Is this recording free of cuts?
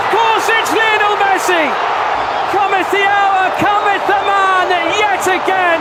yes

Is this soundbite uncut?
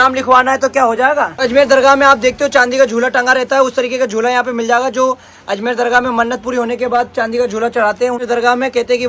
no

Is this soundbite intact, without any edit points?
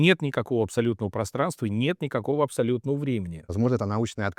no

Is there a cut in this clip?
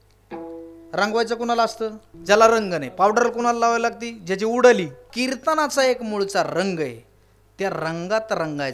yes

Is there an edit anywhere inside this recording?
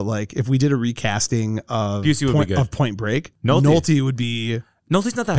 no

